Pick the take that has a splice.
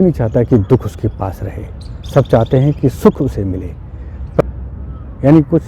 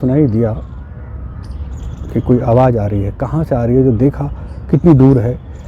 first; 1 cut; at 4.2 s

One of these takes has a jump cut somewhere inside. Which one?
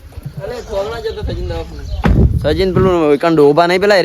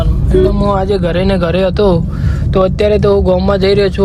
first; 1 cut; at 1.8 s

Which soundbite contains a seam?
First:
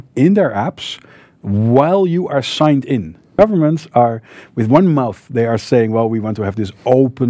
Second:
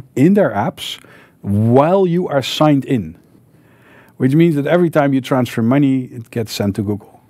first; 1 cut; at 3.3 s

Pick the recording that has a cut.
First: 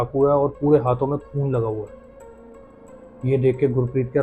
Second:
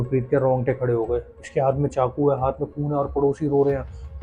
second; 1 cut; at 1.4 s

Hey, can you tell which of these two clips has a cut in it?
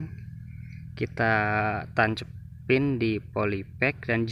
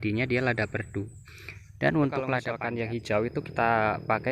second; 1 cut; at 2.5 s

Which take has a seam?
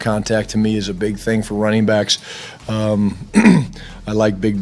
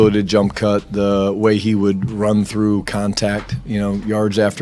second; 1 cut; at 3.5 s

